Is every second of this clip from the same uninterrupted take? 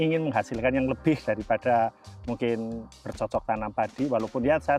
yes; 0 cuts

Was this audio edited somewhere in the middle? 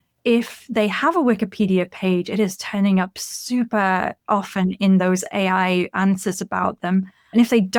no; 0 cuts

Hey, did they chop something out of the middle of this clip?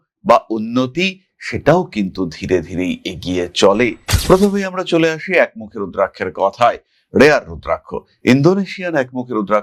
yes; 1 cut; at 4.1 s

